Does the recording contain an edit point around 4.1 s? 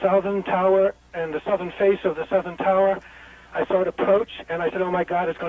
yes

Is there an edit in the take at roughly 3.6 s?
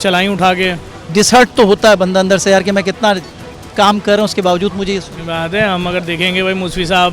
no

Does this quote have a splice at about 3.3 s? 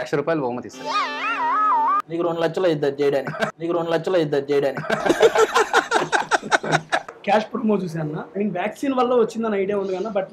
no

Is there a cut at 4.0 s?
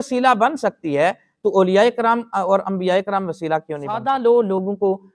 yes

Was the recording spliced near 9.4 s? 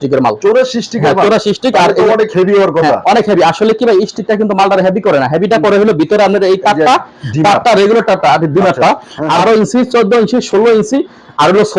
yes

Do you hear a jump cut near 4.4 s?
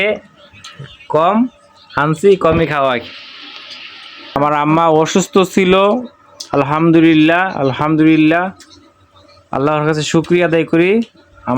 yes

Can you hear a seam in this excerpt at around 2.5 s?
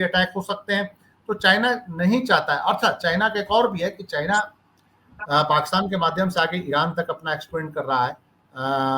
no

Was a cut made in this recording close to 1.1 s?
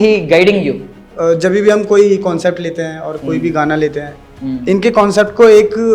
yes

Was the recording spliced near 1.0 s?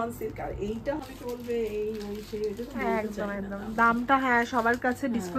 yes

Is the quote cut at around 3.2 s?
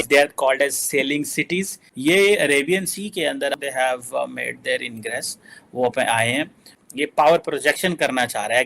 no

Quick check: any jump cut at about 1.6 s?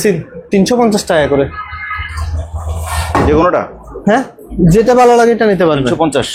no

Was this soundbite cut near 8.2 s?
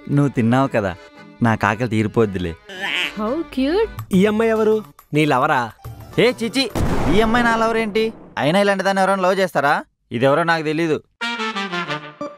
no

